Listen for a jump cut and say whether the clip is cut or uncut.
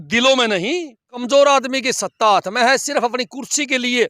cut